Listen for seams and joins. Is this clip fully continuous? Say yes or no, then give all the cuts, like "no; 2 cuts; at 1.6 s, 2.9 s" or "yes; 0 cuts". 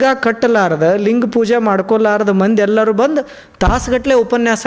yes; 0 cuts